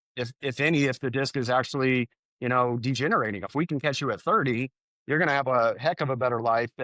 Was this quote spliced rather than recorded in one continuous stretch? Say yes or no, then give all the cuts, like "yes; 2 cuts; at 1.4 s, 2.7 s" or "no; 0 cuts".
yes; 1 cut; at 3.5 s